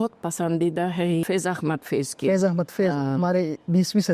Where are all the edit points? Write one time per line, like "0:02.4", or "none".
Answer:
0:01.2